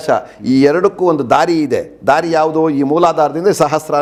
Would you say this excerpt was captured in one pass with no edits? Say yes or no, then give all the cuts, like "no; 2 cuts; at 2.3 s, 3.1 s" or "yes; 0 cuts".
yes; 0 cuts